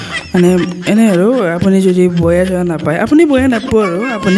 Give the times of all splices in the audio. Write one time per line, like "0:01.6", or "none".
none